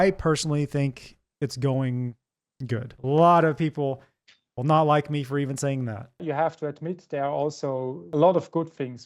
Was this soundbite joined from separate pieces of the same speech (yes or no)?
yes